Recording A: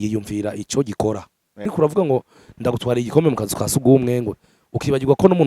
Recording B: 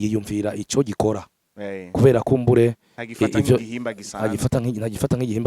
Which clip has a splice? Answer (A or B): A